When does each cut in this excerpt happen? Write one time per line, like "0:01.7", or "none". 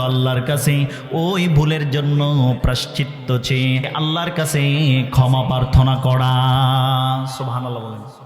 0:03.9